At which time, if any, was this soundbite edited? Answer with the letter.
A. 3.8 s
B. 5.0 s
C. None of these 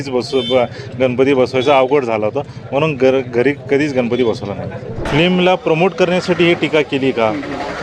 B